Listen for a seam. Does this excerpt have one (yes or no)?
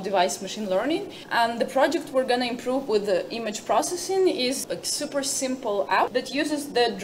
yes